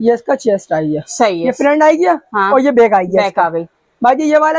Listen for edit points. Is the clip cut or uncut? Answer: uncut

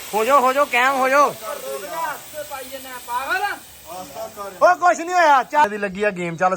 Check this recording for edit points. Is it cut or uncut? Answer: cut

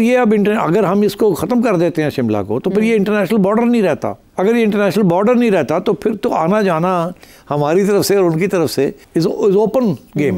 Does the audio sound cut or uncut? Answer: cut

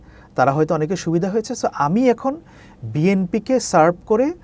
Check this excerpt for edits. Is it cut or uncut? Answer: uncut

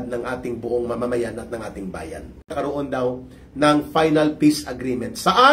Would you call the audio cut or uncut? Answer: cut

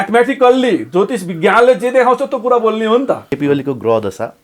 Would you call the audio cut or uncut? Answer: cut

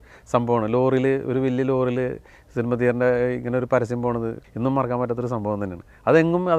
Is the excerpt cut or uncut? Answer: cut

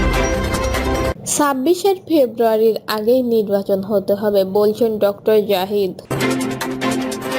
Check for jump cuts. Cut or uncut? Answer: cut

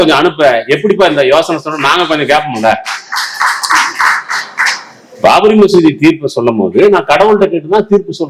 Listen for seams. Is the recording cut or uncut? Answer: uncut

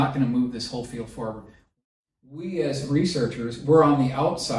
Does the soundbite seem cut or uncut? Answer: cut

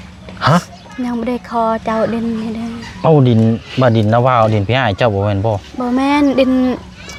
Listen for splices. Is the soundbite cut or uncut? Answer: uncut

